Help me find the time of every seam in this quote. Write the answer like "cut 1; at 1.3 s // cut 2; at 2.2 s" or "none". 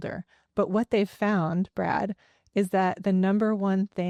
none